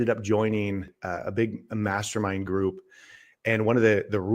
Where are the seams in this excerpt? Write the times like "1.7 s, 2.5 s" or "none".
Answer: 0.9 s